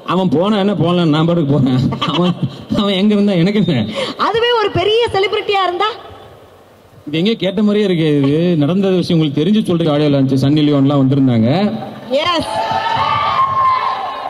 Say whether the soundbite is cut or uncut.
cut